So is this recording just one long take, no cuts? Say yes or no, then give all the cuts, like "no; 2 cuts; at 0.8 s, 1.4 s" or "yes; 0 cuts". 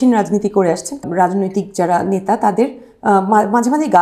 no; 1 cut; at 1.0 s